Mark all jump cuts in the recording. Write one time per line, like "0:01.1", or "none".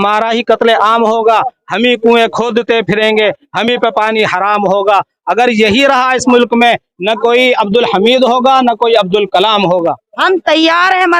0:10.1